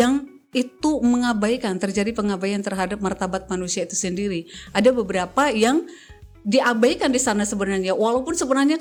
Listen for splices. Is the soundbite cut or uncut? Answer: uncut